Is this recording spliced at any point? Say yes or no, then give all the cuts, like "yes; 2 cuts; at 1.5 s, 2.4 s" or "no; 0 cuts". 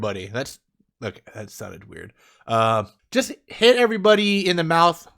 yes; 1 cut; at 3.0 s